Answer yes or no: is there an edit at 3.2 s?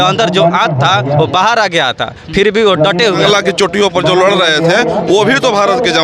yes